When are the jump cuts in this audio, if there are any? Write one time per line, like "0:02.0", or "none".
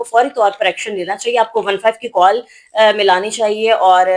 none